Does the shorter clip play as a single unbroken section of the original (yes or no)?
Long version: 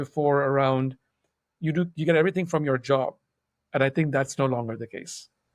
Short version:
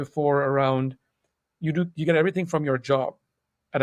yes